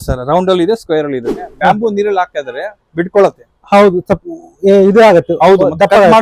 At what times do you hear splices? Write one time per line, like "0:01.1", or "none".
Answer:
0:01.4

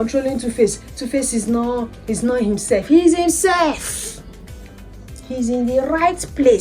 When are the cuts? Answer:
none

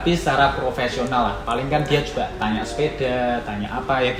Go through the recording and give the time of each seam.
none

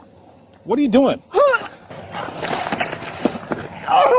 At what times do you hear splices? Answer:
0:01.9

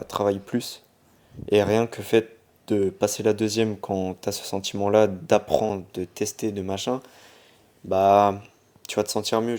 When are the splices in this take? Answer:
none

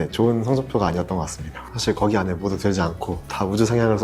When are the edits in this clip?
0:01.6

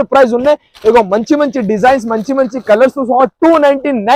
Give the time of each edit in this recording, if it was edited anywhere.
none

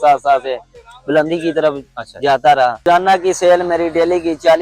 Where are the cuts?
0:02.8

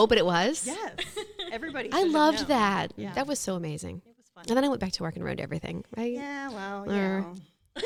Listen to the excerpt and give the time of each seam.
none

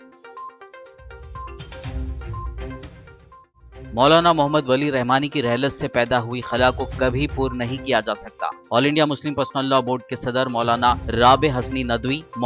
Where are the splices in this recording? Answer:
0:03.8

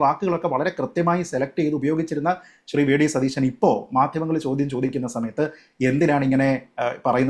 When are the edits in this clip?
none

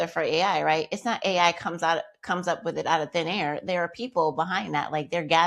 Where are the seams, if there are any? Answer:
none

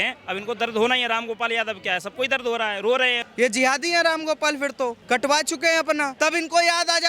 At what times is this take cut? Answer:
0:03.1
0:05.0
0:06.1

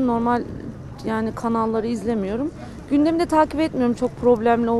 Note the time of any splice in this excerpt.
none

